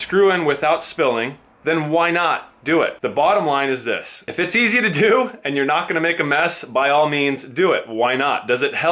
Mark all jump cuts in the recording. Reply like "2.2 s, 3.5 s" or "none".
3.0 s